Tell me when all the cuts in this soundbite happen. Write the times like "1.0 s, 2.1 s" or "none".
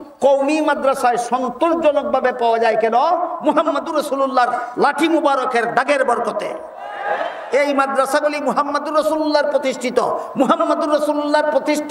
none